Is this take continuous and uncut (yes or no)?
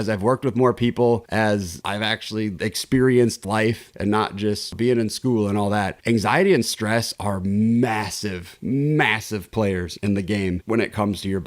no